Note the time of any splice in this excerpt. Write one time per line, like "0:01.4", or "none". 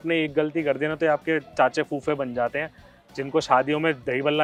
none